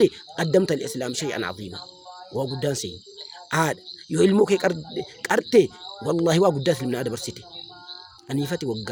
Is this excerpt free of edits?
yes; 0 cuts

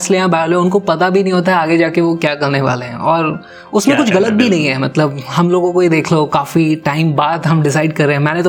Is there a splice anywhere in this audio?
no; 0 cuts

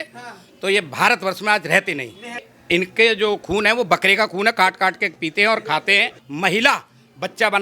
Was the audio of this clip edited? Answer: yes; 2 cuts; at 2.5 s, 6.2 s

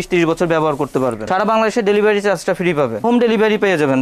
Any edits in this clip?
yes; 2 cuts; at 1.2 s, 3.0 s

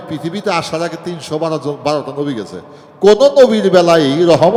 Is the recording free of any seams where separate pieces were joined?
yes; 0 cuts

